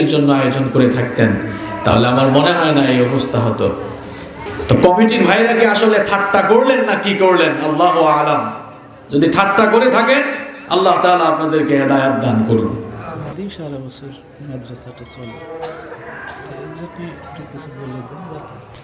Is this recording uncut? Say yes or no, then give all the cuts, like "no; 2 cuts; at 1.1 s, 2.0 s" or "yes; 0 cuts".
no; 2 cuts; at 4.4 s, 13.3 s